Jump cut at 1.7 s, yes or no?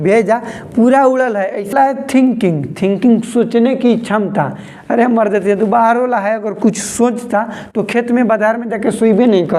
yes